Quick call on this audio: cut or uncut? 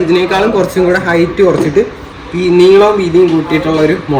uncut